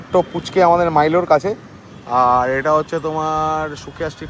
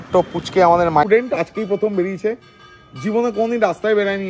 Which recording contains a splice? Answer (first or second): second